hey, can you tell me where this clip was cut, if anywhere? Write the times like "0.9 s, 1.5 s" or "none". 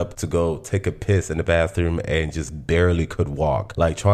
none

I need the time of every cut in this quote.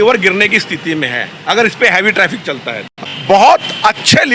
2.8 s

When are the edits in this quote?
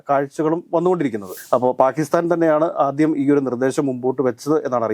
1.3 s

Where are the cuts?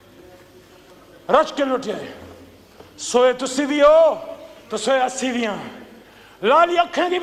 none

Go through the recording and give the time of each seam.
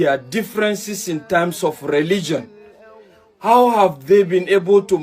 none

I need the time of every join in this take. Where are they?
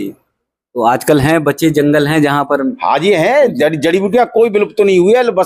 none

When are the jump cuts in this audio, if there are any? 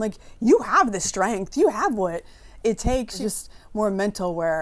3.2 s

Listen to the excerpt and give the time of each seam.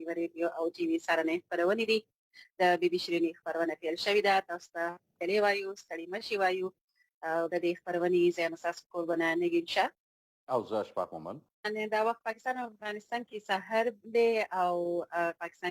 11.7 s

